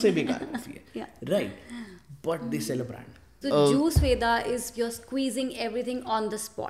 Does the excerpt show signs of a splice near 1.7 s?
no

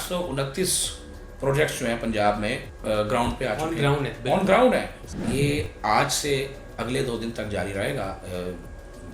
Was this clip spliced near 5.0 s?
yes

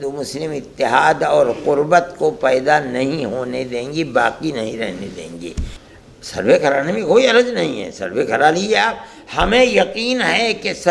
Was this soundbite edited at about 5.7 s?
yes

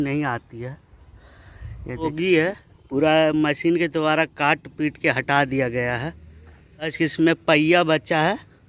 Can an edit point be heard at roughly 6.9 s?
yes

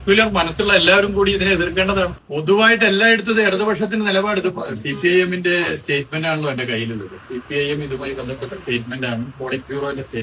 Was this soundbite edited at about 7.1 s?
no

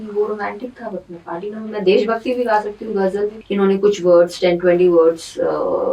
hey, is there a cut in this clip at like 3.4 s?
yes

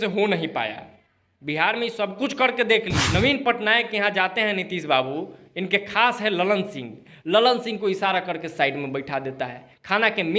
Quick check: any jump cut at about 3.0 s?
yes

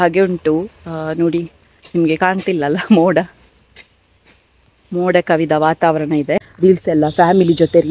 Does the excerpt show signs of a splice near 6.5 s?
yes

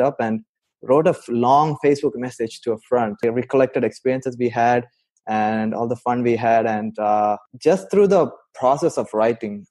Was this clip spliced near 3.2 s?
yes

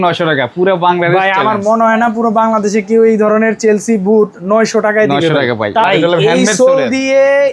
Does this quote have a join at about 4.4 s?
no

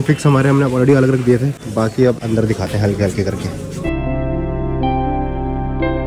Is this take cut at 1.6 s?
no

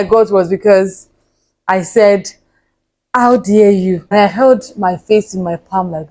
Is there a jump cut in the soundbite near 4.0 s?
yes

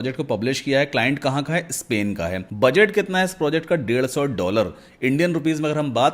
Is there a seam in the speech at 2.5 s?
yes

